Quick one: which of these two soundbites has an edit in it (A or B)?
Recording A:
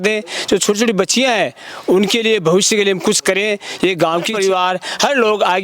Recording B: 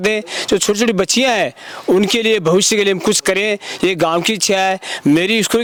A